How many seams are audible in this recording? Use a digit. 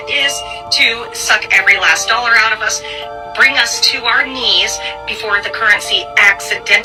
0